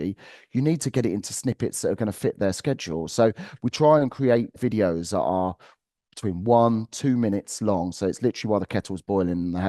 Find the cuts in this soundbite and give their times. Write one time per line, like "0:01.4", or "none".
0:04.5

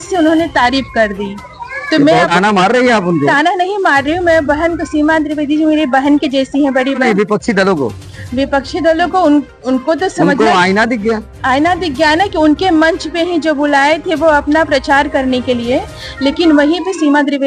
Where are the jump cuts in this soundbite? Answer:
0:02.3
0:07.0

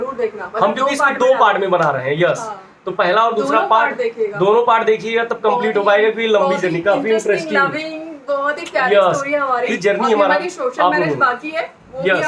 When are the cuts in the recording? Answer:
0:09.7

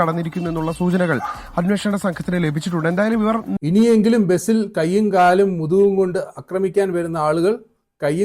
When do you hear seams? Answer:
0:03.5

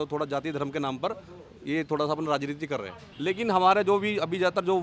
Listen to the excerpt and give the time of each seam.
0:03.1

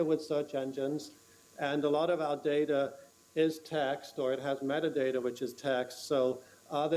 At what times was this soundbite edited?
0:03.4

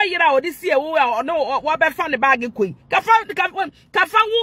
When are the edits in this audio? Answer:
none

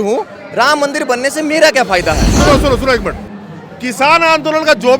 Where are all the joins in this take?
0:02.4

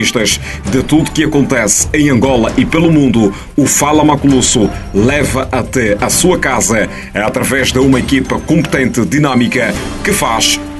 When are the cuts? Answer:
none

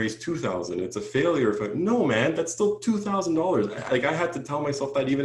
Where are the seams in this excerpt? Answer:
none

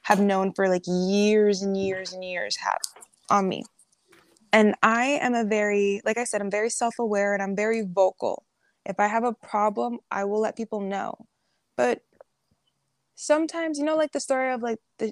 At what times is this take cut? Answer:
0:04.3

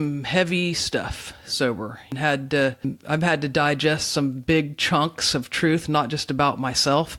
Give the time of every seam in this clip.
0:02.1
0:02.9

